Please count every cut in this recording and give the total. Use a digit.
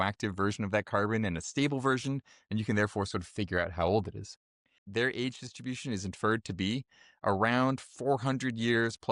1